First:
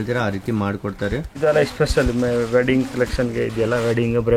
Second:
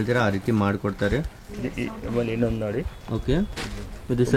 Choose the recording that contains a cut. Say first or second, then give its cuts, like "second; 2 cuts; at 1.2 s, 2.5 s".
first; 1 cut; at 1.4 s